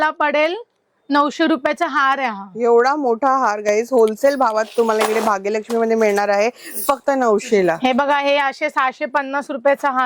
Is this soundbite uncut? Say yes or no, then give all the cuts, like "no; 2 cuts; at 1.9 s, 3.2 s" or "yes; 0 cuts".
yes; 0 cuts